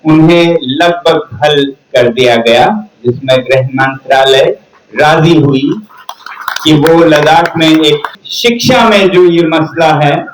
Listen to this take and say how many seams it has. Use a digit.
1